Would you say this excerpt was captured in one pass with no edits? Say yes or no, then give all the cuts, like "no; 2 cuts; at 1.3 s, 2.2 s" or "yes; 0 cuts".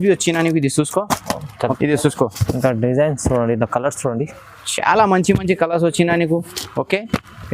no; 1 cut; at 1.8 s